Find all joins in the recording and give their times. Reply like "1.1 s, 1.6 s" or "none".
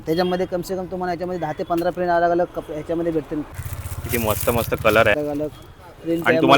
3.6 s, 5.1 s